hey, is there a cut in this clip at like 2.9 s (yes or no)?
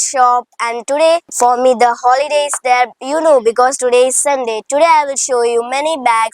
no